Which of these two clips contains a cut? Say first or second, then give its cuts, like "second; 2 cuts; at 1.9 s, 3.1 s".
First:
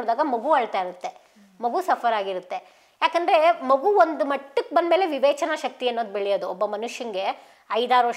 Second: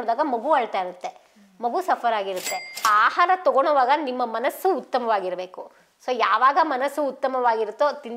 second; 1 cut; at 2.9 s